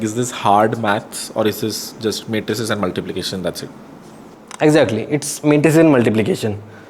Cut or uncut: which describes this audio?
uncut